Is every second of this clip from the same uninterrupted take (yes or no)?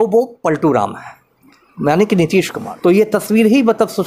no